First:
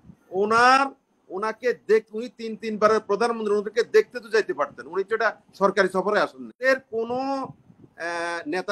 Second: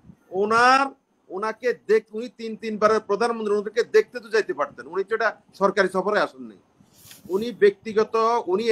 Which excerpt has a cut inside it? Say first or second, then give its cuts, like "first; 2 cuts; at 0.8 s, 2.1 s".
first; 1 cut; at 6.7 s